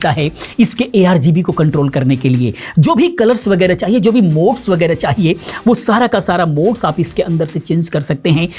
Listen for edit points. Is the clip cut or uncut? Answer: uncut